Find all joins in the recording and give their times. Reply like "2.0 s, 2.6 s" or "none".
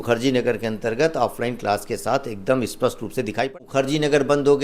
3.5 s

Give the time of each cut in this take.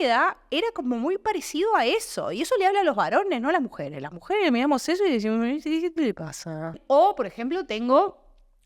6.8 s

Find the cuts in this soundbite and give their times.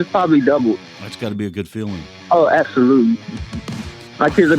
1.0 s, 2.1 s

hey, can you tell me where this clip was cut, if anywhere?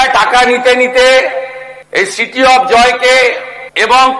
none

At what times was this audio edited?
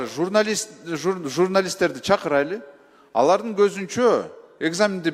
none

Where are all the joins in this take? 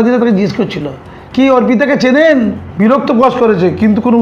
2.6 s

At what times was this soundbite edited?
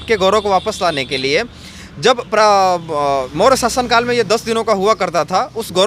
none

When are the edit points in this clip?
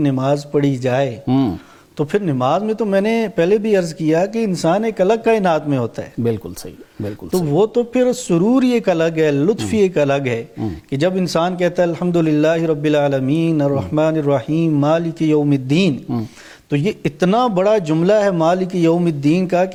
none

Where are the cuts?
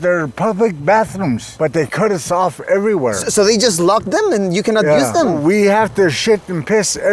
none

